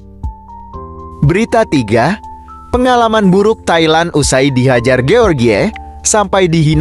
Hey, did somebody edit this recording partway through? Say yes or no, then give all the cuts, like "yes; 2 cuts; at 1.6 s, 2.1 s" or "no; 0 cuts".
yes; 1 cut; at 0.9 s